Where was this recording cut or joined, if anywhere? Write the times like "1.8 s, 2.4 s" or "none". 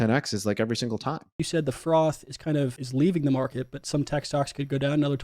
1.4 s, 2.8 s